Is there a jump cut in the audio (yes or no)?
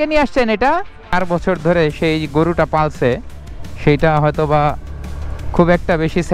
yes